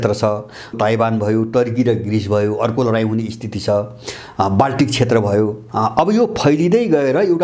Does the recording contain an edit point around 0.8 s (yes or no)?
yes